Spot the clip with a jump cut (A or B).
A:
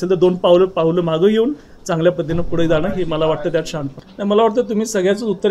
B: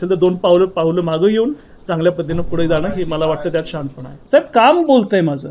B